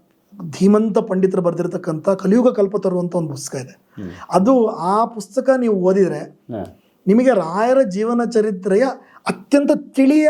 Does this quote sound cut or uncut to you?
uncut